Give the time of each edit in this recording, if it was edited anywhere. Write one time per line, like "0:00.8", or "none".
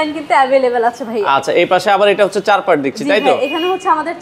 none